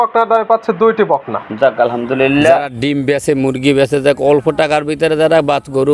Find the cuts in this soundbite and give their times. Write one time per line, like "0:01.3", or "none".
0:02.7